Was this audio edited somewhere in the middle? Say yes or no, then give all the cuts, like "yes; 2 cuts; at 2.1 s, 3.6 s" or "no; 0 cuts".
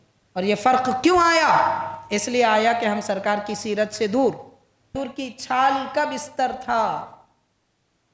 yes; 1 cut; at 4.9 s